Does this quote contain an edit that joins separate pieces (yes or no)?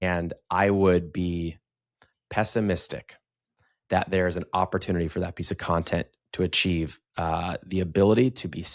no